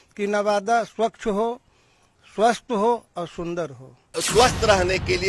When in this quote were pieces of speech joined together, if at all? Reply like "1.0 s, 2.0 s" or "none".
4.2 s